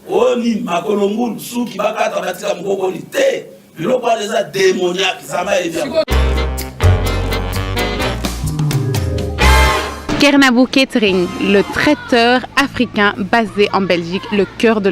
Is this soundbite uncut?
no; 1 cut; at 6.1 s

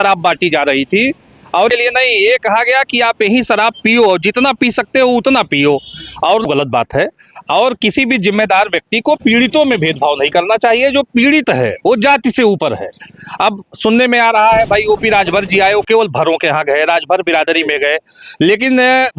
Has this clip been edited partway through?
yes; 2 cuts; at 1.7 s, 6.5 s

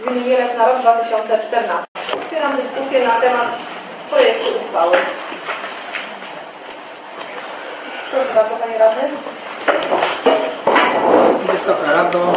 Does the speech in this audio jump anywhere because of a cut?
yes; 1 cut; at 1.9 s

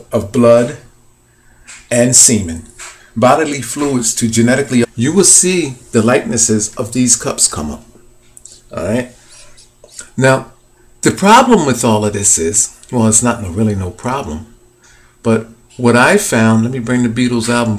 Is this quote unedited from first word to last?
yes; 0 cuts

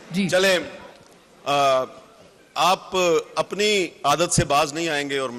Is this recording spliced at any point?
no; 0 cuts

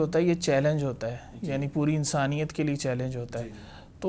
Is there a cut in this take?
no; 0 cuts

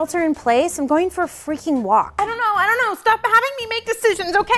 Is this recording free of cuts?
no; 1 cut; at 2.1 s

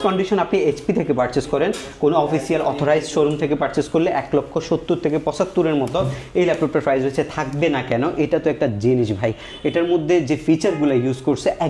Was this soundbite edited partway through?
no; 0 cuts

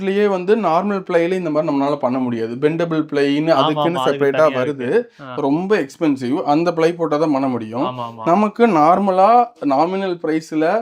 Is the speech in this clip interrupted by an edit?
no; 0 cuts

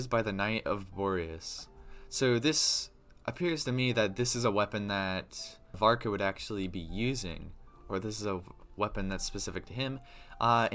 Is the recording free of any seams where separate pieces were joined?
no; 1 cut; at 5.8 s

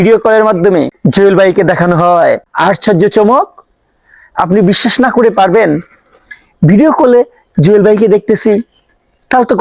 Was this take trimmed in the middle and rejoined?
yes; 2 cuts; at 0.9 s, 2.5 s

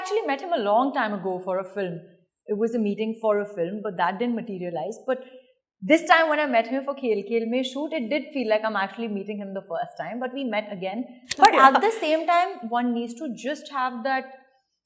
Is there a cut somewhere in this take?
yes; 1 cut; at 11.2 s

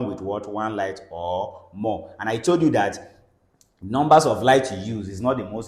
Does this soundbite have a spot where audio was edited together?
no; 0 cuts

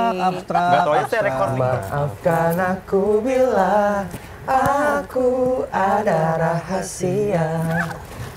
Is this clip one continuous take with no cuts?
no; 1 cut; at 1.5 s

